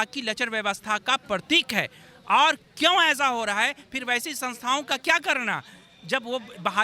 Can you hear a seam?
no; 0 cuts

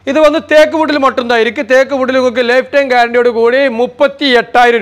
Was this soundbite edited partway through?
no; 0 cuts

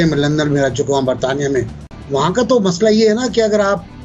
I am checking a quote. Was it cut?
yes; 1 cut; at 1.8 s

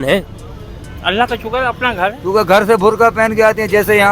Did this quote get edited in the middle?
yes; 1 cut; at 2.2 s

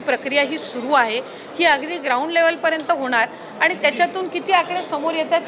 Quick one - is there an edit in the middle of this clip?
no; 0 cuts

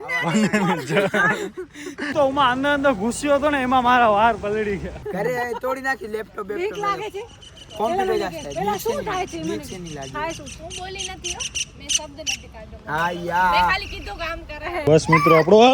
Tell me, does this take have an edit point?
yes; 3 cuts; at 2.1 s, 5.4 s, 14.8 s

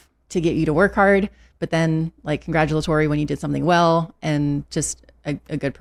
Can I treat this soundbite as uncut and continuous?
yes; 0 cuts

